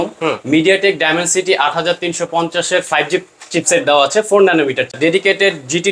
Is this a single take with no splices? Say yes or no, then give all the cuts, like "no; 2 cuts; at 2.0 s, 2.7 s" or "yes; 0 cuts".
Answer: no; 1 cut; at 4.9 s